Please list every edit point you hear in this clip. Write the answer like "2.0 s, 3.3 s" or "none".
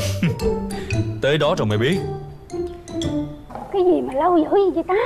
3.5 s